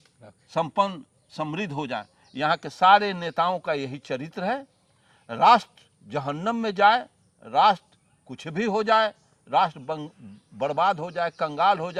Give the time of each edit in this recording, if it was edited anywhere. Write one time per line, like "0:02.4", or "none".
none